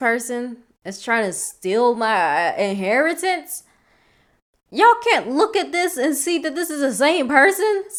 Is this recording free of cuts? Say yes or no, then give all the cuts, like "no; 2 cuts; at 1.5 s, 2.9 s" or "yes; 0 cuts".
yes; 0 cuts